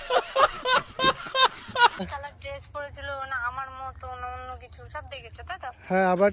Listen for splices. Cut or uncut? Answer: cut